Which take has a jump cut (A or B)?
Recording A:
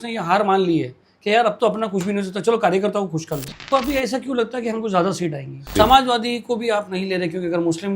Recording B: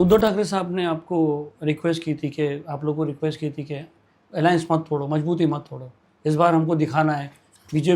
A